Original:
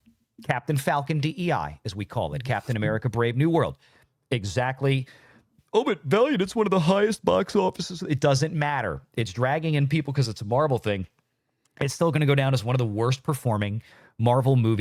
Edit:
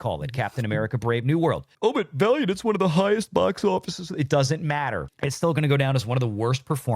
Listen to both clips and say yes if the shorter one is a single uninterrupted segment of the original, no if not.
no